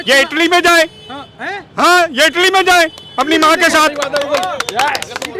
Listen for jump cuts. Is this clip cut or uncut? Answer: uncut